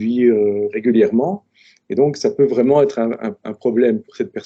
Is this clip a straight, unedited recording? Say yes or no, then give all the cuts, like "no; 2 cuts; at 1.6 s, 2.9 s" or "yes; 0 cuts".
yes; 0 cuts